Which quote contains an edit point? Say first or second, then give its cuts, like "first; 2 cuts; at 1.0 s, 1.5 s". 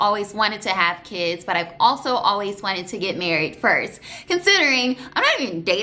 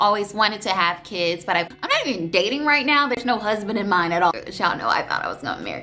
second; 2 cuts; at 1.7 s, 4.3 s